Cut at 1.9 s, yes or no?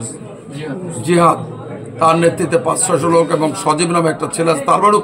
no